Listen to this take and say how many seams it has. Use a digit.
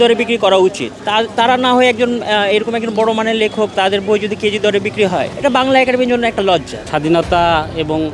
3